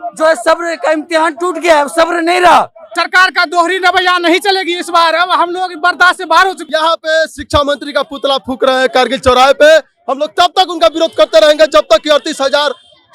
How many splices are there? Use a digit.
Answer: 2